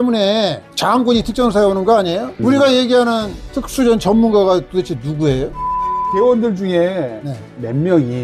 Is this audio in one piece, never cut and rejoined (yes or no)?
no